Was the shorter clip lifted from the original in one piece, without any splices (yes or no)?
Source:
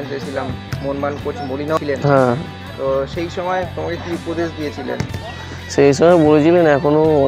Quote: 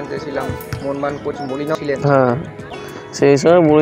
no